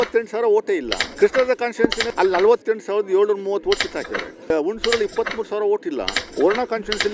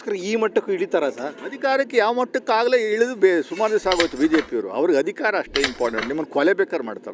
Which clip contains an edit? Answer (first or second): first